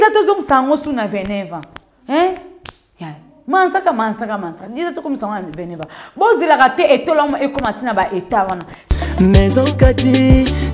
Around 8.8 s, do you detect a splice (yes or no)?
yes